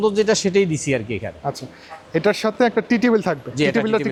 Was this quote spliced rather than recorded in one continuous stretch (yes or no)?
no